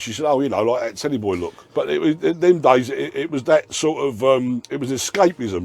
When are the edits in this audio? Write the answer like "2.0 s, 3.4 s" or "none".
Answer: 1.6 s